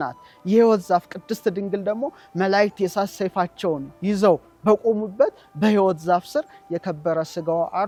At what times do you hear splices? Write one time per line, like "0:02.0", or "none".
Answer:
none